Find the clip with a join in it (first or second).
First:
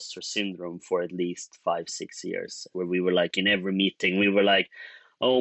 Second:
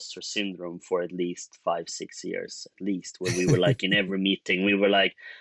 first